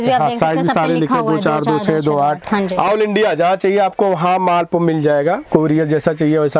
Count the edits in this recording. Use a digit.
1